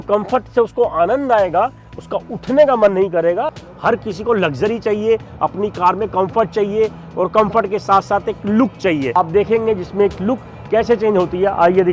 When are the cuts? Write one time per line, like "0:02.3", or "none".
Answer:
0:03.6
0:09.2